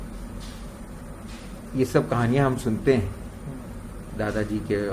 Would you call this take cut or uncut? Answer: uncut